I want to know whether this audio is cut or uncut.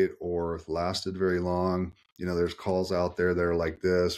uncut